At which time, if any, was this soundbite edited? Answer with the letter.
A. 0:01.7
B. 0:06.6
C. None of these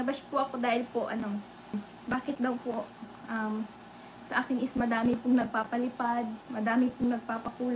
A